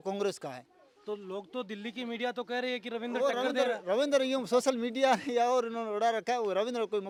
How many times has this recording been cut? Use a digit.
0